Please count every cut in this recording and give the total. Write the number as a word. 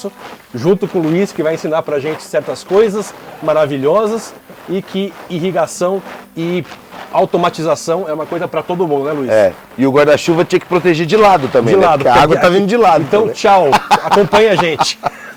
zero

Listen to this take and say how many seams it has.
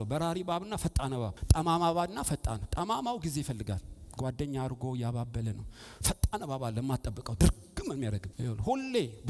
two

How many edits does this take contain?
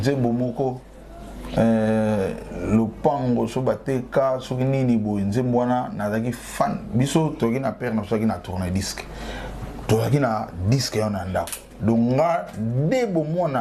zero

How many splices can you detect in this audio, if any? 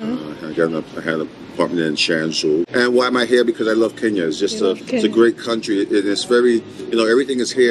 one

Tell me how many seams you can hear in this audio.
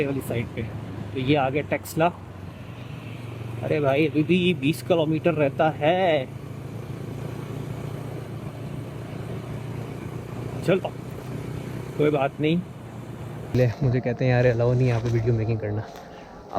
one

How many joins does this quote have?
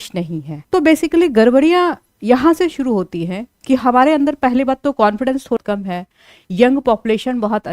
one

